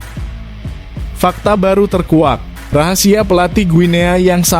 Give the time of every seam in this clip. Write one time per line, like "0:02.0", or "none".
0:01.2